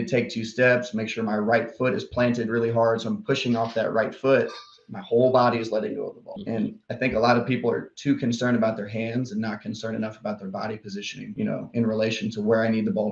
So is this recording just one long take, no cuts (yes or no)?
yes